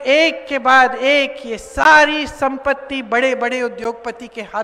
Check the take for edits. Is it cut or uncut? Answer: uncut